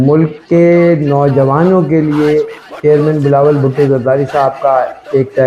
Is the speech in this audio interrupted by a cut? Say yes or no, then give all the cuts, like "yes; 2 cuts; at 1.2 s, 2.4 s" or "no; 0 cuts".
no; 0 cuts